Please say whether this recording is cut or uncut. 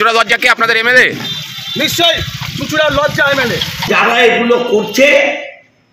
cut